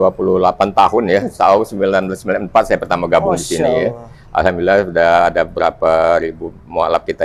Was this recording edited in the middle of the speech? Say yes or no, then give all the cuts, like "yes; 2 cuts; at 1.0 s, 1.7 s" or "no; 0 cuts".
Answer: no; 0 cuts